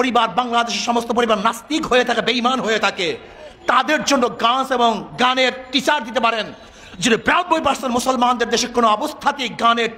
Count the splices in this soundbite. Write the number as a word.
zero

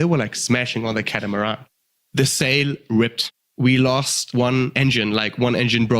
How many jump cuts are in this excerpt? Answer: three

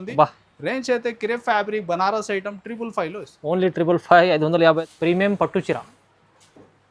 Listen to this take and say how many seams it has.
one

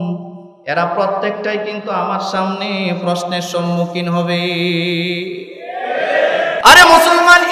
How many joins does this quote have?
one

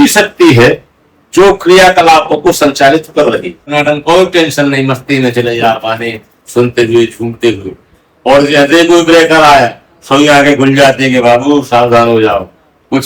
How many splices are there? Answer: one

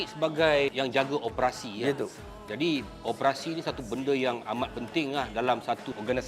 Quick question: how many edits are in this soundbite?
zero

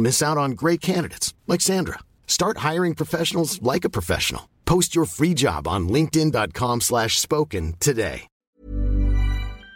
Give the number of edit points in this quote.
one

